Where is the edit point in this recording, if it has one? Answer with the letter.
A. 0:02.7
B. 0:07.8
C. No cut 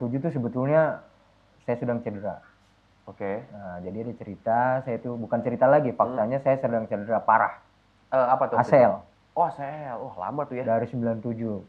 C